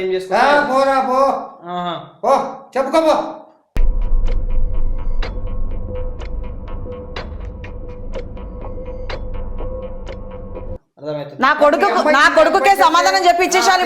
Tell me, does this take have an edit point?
yes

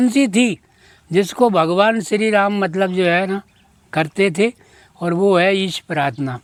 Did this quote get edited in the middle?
no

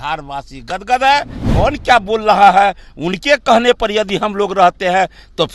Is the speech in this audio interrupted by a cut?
yes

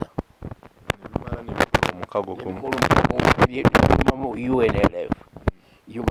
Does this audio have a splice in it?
no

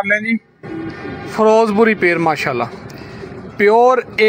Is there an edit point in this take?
no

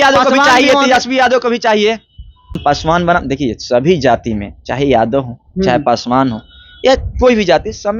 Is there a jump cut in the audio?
no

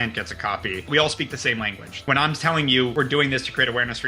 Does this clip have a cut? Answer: yes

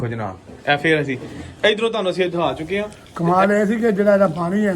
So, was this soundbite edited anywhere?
yes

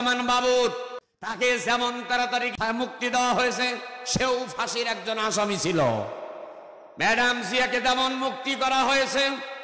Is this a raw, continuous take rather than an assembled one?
no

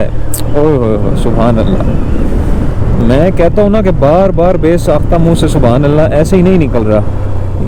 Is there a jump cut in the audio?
no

